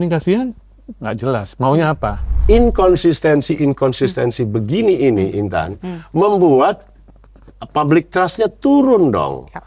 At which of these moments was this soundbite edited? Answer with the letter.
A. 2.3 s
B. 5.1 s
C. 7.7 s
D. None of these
A